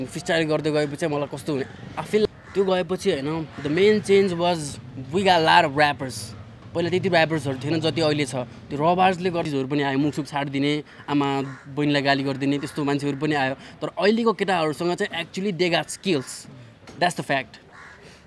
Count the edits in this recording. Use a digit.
2